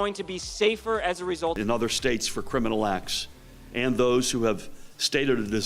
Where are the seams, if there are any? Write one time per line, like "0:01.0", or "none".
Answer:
0:01.6